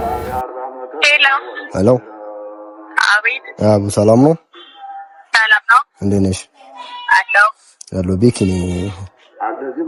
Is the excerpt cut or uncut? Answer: uncut